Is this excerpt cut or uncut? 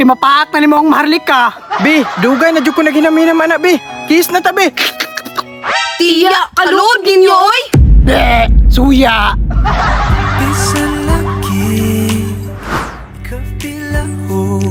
uncut